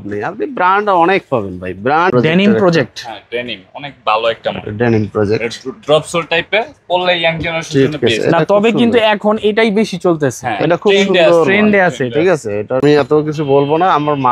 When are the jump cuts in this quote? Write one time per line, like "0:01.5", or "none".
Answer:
0:02.1
0:12.8